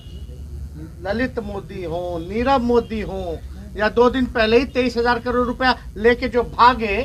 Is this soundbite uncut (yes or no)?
yes